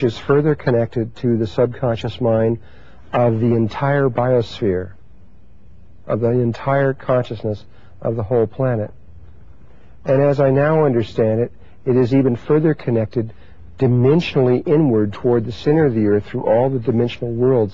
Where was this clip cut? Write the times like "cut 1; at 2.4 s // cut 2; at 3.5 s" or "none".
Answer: cut 1; at 0.9 s